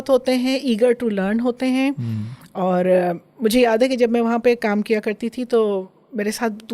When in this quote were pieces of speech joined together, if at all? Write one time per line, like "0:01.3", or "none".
none